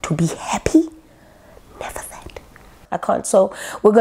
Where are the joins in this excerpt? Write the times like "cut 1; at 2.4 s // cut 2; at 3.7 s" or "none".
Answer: cut 1; at 2.8 s